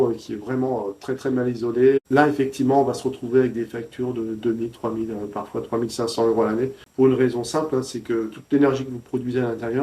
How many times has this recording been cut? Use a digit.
0